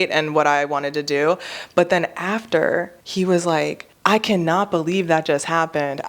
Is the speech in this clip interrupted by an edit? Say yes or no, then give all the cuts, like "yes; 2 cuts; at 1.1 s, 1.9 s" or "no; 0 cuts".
yes; 2 cuts; at 3.0 s, 3.9 s